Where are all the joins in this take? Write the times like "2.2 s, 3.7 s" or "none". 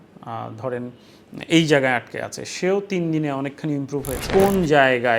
4.2 s